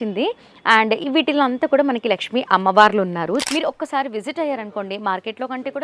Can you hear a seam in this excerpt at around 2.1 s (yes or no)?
no